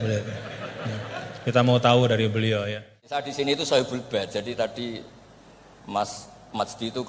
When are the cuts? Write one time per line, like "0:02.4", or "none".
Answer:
0:03.1